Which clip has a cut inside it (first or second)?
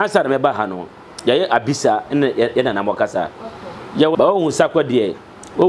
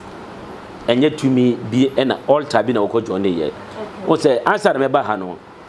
first